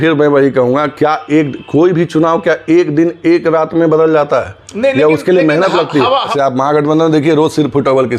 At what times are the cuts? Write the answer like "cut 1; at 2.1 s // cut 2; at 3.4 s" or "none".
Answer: cut 1; at 6.3 s